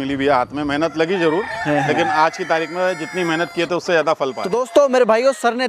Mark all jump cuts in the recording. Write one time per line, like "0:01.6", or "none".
none